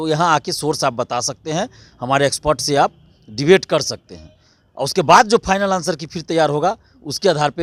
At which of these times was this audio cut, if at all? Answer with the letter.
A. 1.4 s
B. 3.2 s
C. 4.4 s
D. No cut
D